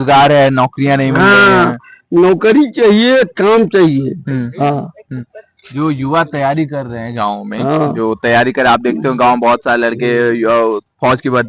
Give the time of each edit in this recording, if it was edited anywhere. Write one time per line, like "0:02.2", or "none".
none